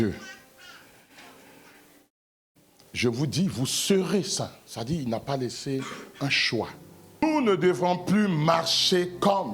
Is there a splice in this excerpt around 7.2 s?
yes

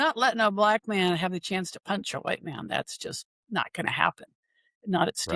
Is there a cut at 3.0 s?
no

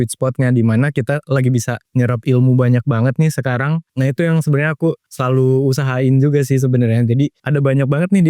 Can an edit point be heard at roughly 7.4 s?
yes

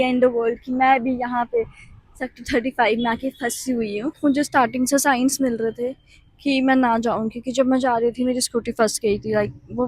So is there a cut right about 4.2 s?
yes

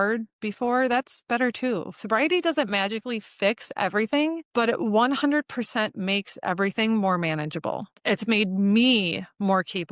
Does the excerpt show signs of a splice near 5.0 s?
no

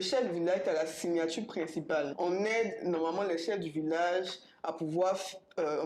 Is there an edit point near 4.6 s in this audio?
no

